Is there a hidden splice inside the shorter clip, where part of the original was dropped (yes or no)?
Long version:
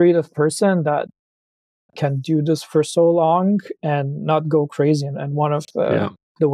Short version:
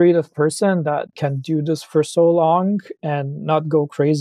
yes